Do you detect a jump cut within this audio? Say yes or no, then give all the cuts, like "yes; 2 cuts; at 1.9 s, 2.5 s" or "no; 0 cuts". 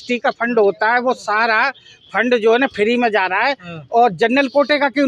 no; 0 cuts